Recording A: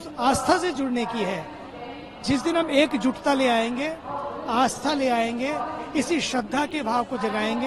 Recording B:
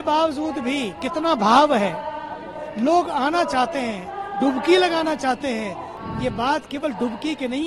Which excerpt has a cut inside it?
B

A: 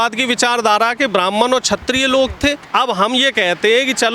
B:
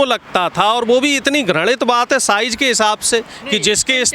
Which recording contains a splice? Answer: A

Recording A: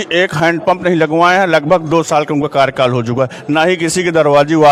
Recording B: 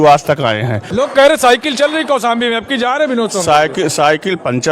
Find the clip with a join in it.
B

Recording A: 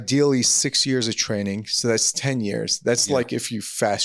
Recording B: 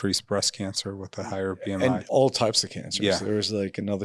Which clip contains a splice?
B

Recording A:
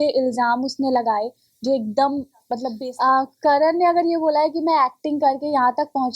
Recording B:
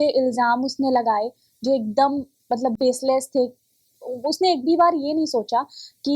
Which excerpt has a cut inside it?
A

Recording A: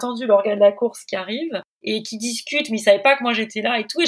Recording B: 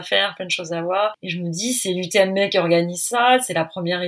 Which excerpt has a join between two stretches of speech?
B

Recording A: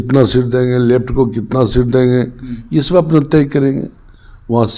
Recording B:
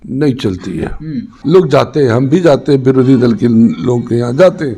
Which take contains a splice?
B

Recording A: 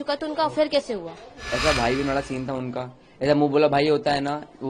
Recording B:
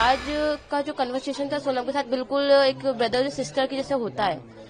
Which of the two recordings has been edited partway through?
A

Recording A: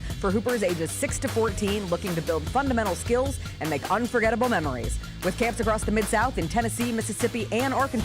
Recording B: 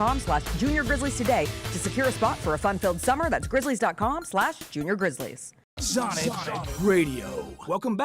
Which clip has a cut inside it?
B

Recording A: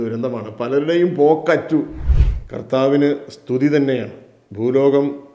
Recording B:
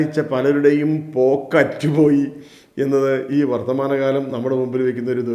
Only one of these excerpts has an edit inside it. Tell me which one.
A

